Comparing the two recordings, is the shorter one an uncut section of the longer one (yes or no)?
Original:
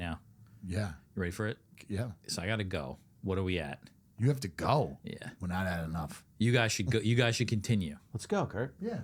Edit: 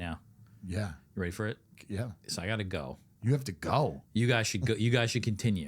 no